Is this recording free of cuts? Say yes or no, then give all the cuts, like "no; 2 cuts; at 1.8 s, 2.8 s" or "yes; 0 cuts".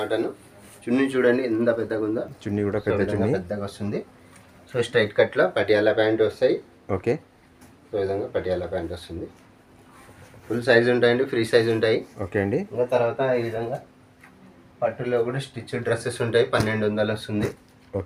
yes; 0 cuts